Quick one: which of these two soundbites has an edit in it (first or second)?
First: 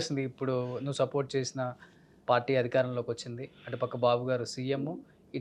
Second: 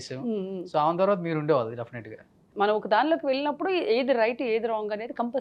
second